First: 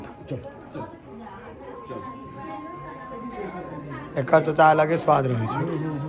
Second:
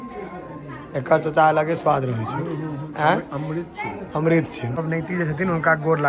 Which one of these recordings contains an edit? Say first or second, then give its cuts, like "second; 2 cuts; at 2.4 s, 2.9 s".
second; 1 cut; at 4.7 s